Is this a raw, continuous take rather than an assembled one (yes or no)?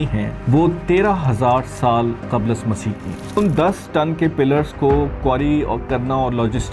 no